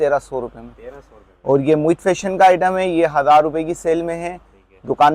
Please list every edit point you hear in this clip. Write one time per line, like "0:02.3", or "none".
none